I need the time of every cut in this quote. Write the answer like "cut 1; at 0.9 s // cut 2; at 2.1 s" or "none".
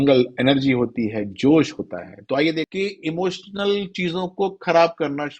cut 1; at 2.7 s